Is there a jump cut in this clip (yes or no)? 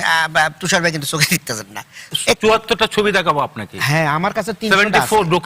yes